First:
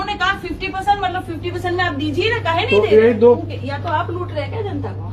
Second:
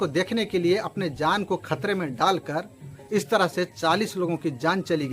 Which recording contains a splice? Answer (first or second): first